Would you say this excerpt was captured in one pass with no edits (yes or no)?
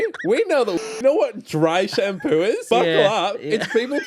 no